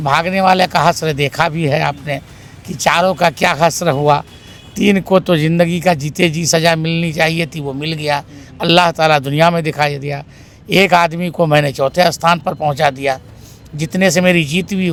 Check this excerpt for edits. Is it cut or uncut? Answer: uncut